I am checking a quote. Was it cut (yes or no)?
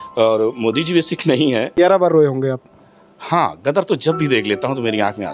yes